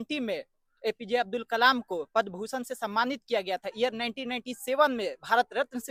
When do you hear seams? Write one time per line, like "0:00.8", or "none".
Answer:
none